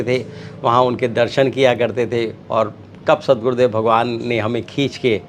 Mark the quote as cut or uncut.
uncut